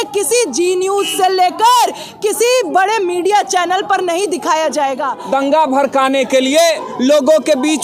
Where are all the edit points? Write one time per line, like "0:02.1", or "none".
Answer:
0:05.1